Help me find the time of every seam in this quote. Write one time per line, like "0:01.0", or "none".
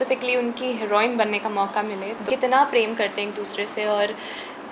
0:02.2